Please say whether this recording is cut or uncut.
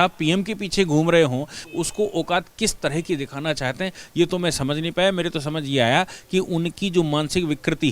cut